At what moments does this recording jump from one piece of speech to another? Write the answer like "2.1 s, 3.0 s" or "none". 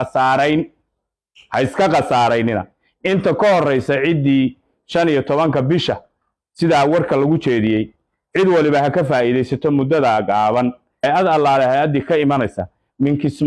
10.9 s